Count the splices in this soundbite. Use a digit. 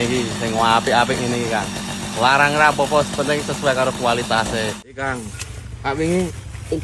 1